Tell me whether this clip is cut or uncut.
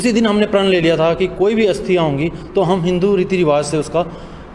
uncut